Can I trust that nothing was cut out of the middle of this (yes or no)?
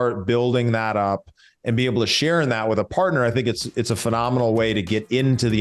yes